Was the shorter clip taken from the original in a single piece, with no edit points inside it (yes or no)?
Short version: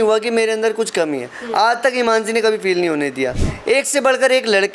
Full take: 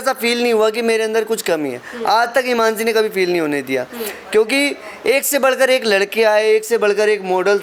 no